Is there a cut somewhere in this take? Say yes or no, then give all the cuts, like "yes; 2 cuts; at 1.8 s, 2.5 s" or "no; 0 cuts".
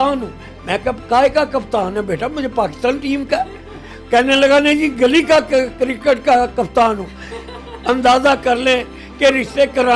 no; 0 cuts